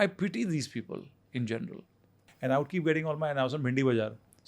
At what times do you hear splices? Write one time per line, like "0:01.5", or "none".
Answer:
0:02.2